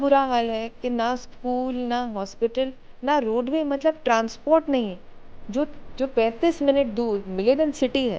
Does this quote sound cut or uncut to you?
uncut